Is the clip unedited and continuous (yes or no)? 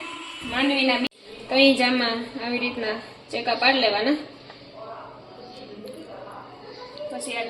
no